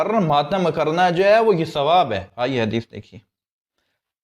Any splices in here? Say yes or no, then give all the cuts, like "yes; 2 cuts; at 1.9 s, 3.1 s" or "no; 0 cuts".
no; 0 cuts